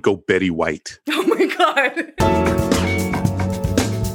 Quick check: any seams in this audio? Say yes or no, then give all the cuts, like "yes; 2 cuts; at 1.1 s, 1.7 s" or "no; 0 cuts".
yes; 1 cut; at 2.1 s